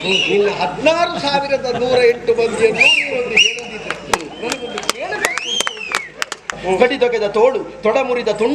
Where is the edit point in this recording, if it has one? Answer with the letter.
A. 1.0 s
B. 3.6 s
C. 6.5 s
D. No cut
C